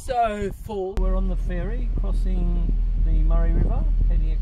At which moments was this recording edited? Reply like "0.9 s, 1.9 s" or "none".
1.0 s